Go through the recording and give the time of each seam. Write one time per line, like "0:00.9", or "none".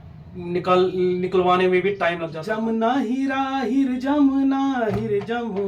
0:02.3